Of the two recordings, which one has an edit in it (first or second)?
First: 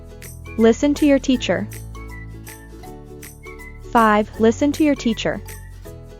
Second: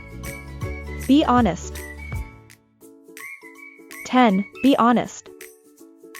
second